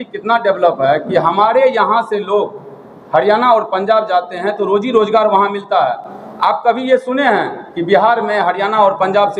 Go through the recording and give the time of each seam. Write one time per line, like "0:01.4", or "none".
none